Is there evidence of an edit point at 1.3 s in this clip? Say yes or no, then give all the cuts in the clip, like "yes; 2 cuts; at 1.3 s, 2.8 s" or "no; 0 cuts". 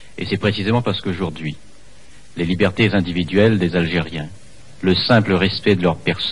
yes; 1 cut; at 1.3 s